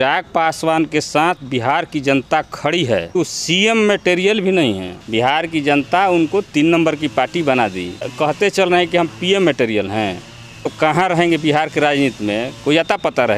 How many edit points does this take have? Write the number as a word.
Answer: four